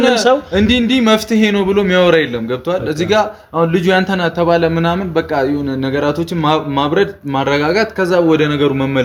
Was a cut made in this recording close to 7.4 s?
no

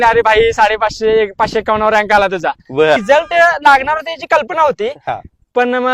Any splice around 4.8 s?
no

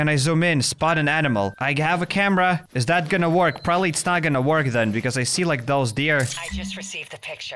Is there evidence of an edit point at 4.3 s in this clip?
no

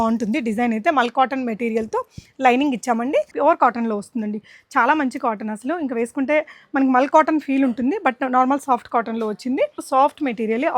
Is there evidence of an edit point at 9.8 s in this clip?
yes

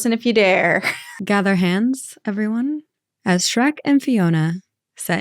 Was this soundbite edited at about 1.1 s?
yes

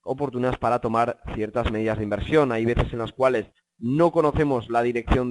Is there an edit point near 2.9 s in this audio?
yes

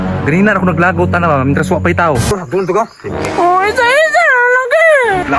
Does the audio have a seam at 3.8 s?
no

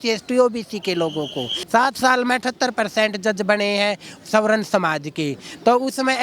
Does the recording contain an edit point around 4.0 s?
no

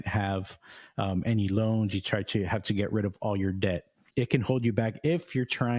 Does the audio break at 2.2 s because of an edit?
no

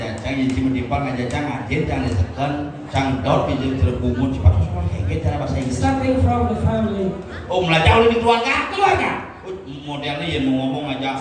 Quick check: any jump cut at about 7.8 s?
no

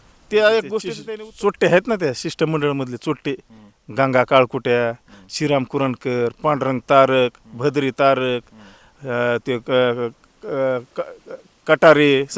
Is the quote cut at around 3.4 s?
no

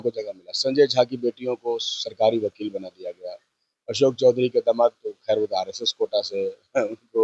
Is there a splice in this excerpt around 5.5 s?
no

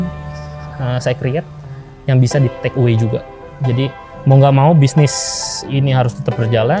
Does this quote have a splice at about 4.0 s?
yes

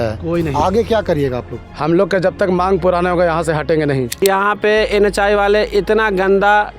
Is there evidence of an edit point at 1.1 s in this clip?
no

